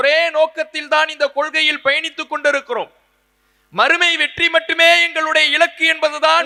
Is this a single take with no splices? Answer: yes; 0 cuts

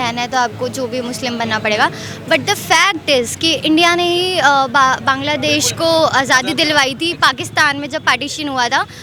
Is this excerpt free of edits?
yes; 0 cuts

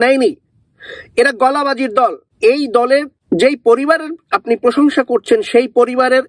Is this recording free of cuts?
no; 2 cuts; at 2.2 s, 3.1 s

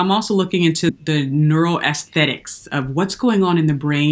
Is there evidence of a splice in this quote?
yes; 1 cut; at 0.9 s

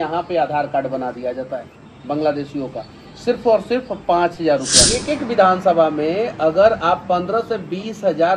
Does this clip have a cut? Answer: yes; 1 cut; at 5.0 s

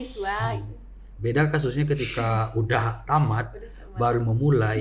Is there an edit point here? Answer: no; 0 cuts

